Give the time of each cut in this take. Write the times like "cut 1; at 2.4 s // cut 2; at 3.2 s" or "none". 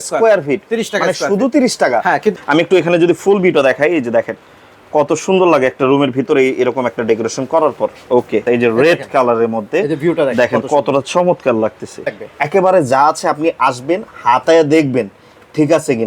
cut 1; at 2.3 s // cut 2; at 8.4 s // cut 3; at 12.2 s